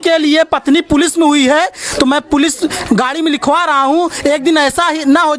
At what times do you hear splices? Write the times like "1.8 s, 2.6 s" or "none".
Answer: none

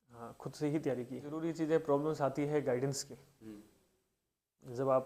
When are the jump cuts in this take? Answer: 1.4 s

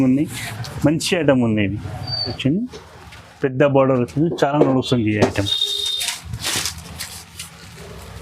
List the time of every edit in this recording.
2.4 s

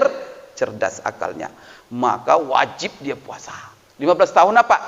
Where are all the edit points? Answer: none

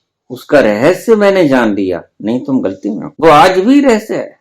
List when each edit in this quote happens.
3.1 s

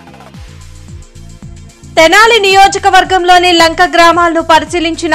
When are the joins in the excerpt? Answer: none

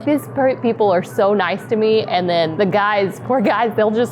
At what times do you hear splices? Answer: 2.5 s

